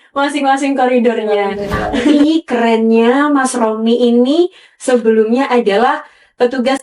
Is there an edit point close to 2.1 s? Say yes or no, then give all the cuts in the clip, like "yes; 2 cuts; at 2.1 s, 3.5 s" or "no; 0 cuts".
yes; 1 cut; at 2.1 s